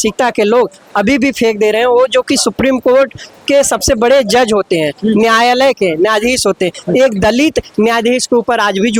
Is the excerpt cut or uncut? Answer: uncut